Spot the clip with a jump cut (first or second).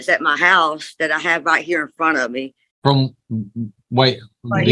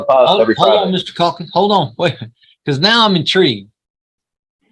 first